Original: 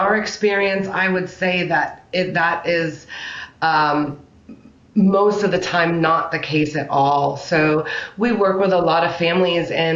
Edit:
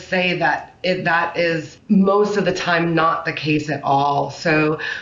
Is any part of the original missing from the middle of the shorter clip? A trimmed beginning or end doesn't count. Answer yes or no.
yes